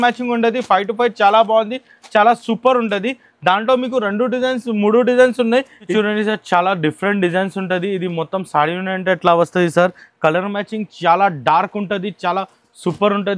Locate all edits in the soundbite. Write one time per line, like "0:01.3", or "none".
0:05.9